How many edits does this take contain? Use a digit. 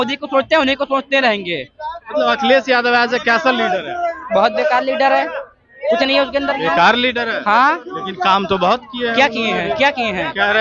0